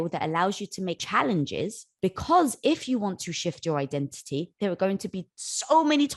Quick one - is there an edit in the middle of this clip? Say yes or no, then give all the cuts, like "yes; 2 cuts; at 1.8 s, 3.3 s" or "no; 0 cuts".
yes; 2 cuts; at 1.0 s, 1.8 s